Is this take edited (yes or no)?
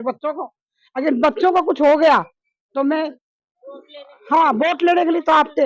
no